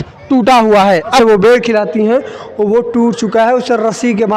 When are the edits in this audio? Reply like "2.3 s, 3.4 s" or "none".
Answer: 1.2 s